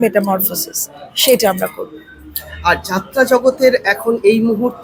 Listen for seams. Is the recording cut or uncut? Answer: uncut